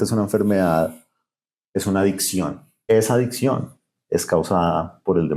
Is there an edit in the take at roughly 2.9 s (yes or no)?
yes